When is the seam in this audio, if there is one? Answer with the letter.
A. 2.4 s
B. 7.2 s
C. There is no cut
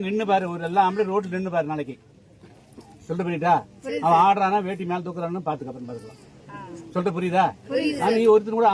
C